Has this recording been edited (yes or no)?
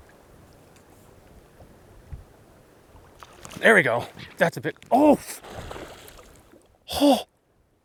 no